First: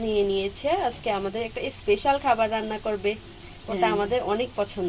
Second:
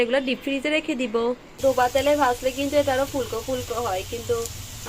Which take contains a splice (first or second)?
second